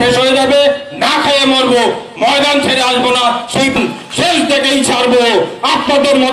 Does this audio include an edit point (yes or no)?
yes